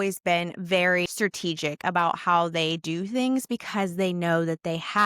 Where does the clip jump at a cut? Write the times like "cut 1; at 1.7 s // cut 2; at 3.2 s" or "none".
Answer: cut 1; at 1.1 s